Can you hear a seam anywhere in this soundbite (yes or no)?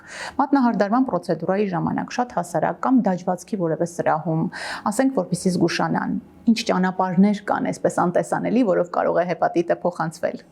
no